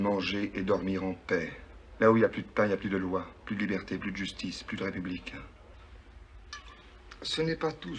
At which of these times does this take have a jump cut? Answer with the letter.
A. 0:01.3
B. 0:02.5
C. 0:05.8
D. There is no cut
C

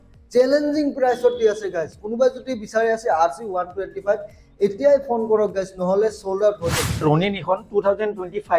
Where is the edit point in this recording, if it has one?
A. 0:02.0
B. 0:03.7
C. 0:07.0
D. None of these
C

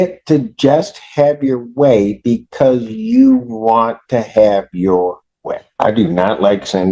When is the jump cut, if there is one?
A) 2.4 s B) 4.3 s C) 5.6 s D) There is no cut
C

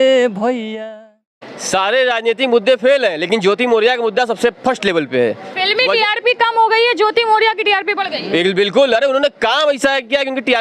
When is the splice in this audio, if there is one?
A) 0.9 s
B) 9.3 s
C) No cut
A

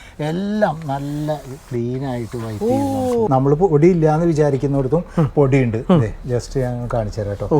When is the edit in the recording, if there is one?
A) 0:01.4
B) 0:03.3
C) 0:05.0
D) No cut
B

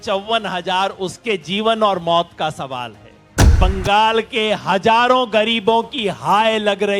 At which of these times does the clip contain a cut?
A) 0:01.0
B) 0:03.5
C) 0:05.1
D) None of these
B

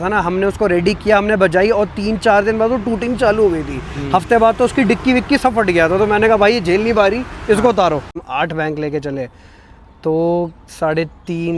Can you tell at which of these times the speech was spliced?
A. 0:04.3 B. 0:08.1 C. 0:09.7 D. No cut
B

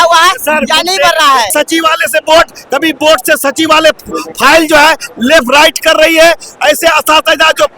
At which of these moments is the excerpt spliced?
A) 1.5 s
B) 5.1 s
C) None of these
A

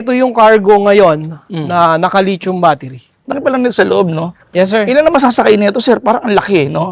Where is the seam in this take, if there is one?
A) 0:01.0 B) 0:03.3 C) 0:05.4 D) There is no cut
B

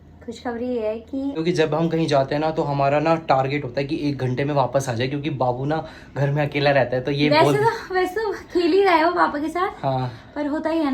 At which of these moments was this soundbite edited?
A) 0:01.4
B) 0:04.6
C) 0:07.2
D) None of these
A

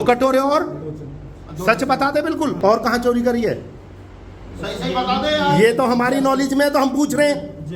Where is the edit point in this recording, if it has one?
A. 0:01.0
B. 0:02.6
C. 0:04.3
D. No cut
B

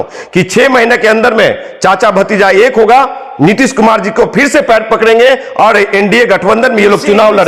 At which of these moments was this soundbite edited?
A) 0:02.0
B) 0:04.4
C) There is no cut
C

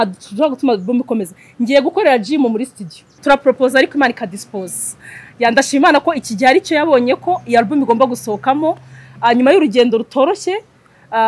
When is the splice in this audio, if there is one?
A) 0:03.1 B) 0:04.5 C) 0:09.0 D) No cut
A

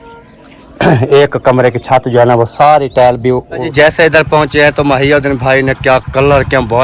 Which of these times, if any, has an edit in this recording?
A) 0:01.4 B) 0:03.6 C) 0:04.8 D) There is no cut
B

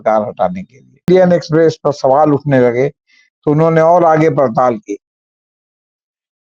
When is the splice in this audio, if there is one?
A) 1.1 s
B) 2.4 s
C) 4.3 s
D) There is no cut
A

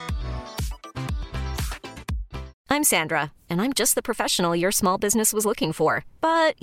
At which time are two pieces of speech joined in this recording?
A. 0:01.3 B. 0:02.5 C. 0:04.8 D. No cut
B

